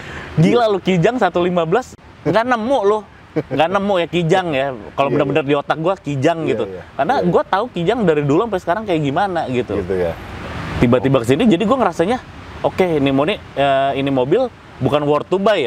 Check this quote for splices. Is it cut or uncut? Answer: uncut